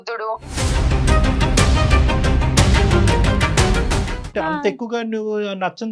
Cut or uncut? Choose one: cut